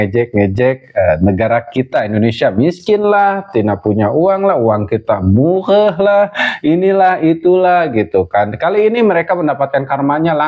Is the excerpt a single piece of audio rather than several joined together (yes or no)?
yes